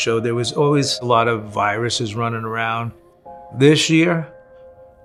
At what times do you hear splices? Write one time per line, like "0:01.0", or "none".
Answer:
none